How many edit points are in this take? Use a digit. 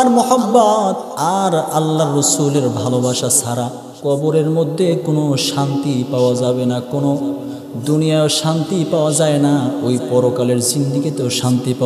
2